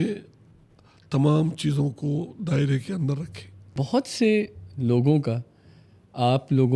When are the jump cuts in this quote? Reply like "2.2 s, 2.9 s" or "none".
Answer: 3.8 s